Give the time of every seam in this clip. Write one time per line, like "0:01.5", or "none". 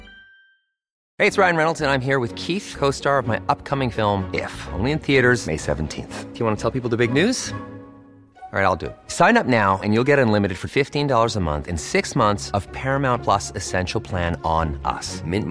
0:01.0